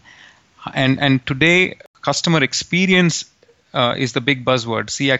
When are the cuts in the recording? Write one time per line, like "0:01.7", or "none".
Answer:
0:01.9